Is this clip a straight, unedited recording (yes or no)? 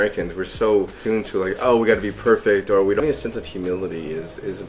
no